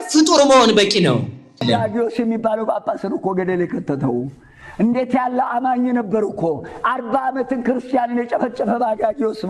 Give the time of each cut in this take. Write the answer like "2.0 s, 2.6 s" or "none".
1.6 s